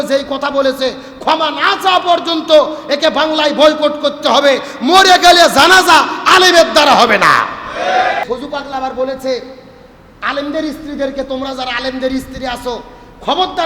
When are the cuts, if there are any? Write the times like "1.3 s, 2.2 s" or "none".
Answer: 8.2 s